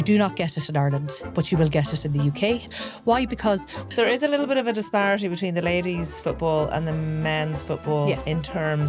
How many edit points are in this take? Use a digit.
3